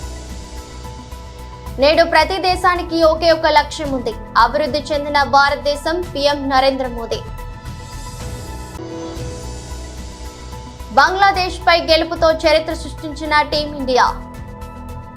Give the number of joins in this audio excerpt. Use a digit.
4